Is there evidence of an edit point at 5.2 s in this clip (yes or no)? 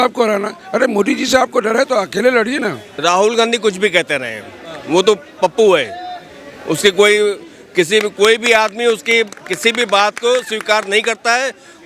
no